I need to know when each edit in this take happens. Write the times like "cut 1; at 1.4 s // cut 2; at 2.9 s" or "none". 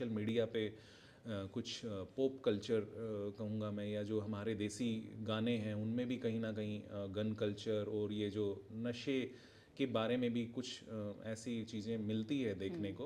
none